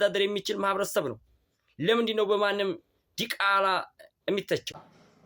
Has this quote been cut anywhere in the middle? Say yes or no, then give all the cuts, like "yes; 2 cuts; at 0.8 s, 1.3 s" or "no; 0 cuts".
no; 0 cuts